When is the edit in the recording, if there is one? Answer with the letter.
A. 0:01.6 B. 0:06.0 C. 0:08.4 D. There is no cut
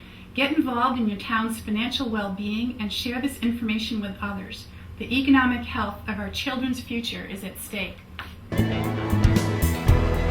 C